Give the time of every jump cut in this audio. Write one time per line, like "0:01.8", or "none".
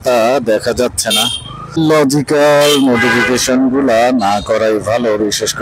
0:01.8